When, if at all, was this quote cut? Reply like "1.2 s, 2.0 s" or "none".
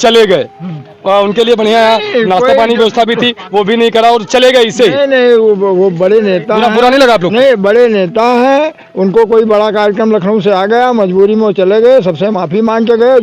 none